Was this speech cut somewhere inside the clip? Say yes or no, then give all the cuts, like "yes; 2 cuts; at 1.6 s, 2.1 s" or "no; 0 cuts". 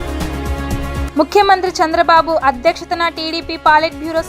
yes; 1 cut; at 1.1 s